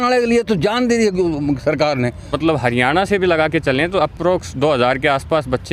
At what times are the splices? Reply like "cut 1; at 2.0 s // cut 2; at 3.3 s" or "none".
cut 1; at 2.3 s